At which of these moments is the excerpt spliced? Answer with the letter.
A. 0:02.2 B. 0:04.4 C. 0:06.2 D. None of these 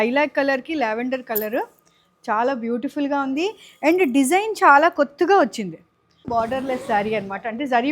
C